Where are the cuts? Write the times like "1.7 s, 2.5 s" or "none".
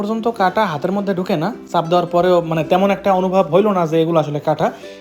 none